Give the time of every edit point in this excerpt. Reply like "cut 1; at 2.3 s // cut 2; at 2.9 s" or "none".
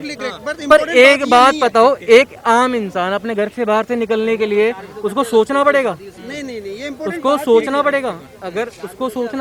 none